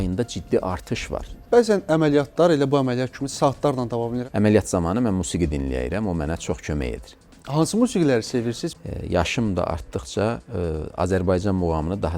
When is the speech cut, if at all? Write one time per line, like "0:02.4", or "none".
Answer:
0:01.3
0:04.2
0:08.6